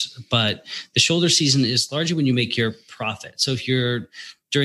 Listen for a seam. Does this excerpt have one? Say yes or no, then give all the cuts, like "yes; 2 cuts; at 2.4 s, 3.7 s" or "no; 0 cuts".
no; 0 cuts